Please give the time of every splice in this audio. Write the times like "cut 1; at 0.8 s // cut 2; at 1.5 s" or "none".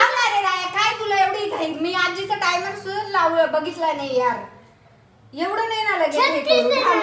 none

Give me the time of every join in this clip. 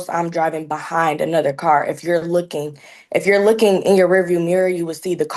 none

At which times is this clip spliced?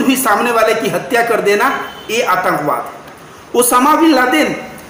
none

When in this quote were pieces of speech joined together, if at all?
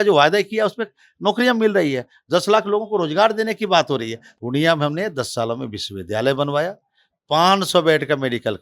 cut 1; at 4.2 s

